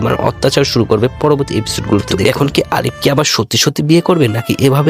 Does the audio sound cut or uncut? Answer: cut